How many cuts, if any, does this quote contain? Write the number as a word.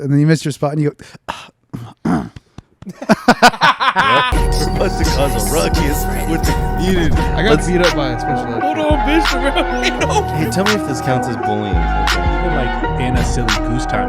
one